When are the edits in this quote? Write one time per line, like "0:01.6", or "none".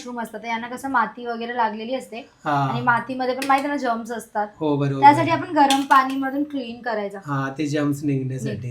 none